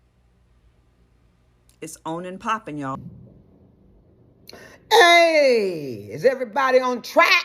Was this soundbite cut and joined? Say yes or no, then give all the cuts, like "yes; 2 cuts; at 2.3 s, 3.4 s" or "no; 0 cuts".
yes; 1 cut; at 2.9 s